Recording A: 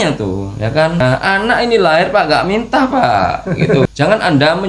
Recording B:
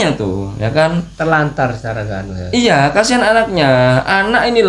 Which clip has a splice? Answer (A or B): A